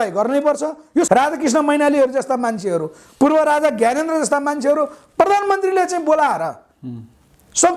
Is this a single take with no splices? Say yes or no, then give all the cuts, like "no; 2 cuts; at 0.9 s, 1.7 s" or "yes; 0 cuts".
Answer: no; 1 cut; at 1.1 s